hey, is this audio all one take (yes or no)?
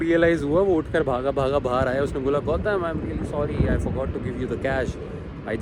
yes